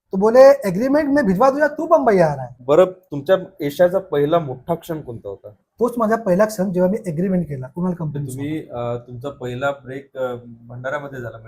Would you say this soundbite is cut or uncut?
cut